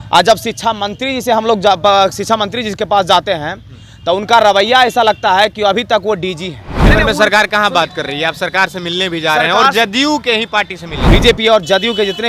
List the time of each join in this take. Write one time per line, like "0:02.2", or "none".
0:06.7
0:10.9